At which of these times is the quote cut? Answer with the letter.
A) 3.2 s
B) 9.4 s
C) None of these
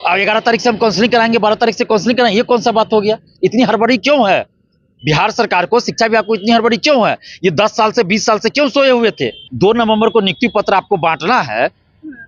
B